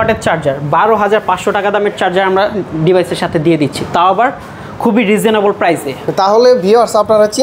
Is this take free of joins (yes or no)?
yes